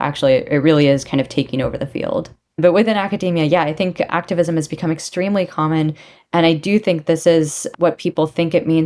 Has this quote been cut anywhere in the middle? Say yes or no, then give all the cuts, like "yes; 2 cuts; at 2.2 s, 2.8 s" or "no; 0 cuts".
yes; 1 cut; at 2.4 s